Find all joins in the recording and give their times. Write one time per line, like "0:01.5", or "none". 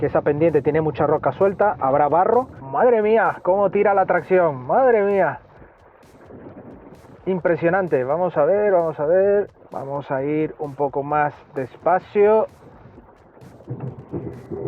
0:02.6
0:09.6